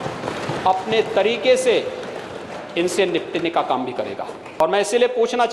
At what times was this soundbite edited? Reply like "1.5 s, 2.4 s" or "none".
4.5 s